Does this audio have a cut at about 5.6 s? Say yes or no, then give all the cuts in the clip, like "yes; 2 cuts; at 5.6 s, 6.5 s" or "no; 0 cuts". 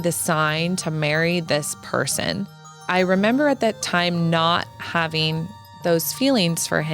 no; 1 cut; at 2.7 s